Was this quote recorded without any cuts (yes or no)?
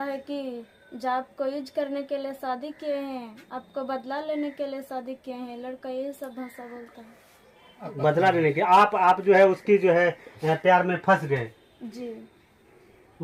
yes